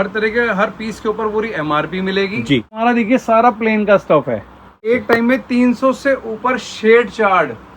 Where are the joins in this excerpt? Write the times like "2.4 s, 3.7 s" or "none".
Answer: 2.8 s, 4.9 s